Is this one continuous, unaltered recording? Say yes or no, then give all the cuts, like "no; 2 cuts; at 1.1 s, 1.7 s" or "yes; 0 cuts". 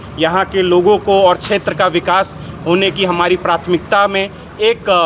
yes; 0 cuts